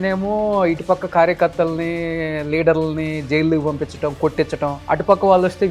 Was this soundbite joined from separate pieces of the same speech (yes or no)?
yes